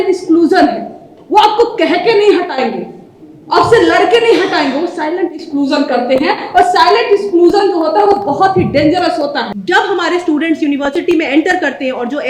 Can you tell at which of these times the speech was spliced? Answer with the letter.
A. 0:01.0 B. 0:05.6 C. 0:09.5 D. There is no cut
C